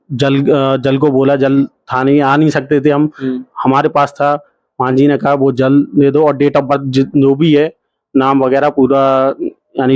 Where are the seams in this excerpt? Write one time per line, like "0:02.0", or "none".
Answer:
none